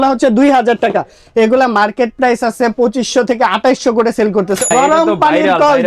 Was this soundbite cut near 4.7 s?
yes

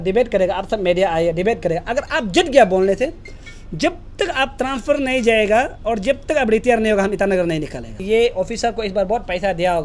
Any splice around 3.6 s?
no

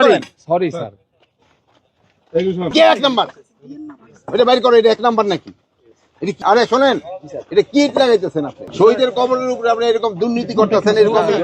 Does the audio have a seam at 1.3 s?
no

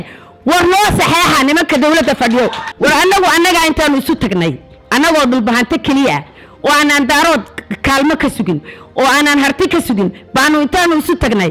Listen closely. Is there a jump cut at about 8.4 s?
no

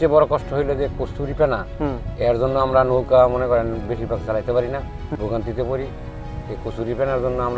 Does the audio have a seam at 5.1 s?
yes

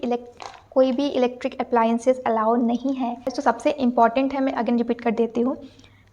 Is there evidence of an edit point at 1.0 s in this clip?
no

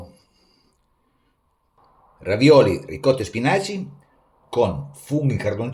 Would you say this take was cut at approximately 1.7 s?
yes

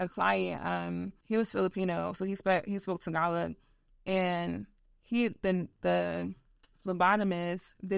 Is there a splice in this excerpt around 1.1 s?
yes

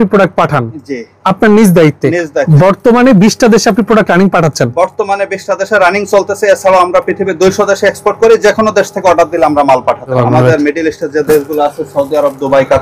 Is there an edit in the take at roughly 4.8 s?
no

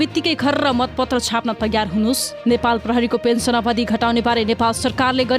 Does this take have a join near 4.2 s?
no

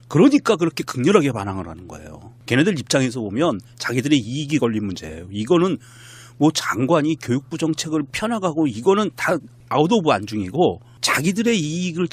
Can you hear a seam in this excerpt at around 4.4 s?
yes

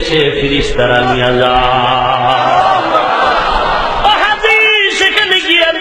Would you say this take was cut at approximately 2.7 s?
no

